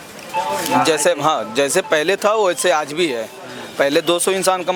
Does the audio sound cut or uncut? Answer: uncut